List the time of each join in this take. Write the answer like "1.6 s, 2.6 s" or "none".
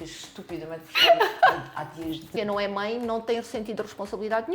2.3 s